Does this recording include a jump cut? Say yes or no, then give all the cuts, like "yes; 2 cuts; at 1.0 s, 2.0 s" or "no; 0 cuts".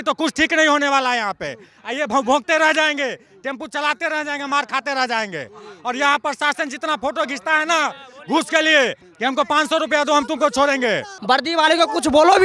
yes; 1 cut; at 11.1 s